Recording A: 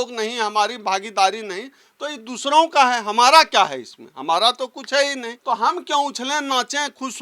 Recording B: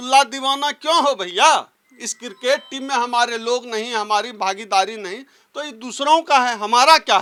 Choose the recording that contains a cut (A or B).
A